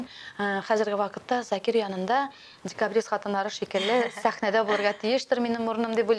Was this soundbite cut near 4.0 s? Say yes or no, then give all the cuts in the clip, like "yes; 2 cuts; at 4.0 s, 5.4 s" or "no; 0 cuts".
no; 0 cuts